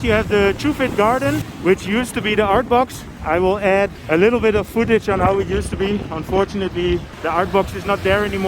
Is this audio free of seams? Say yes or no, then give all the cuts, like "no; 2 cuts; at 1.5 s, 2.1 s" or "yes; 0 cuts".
no; 3 cuts; at 1.5 s, 4.0 s, 7.1 s